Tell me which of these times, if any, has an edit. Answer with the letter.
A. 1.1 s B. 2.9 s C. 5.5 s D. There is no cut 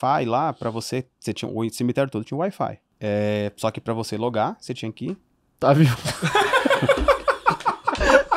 B